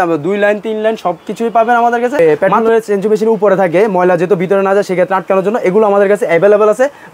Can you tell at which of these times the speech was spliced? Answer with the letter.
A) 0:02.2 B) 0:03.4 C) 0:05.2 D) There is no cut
A